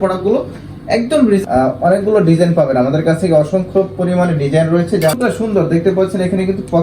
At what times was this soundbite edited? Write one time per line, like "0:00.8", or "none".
0:01.4
0:05.1